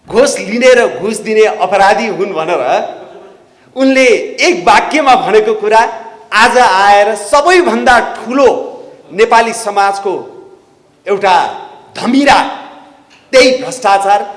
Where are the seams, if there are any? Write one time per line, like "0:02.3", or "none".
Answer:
none